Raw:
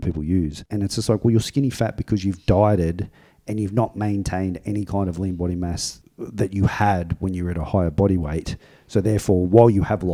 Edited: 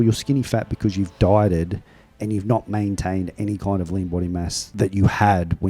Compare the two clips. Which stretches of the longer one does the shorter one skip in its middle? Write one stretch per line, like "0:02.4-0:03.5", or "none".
0:05.9-0:06.2